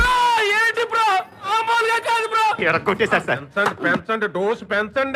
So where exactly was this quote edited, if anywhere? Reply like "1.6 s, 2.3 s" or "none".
none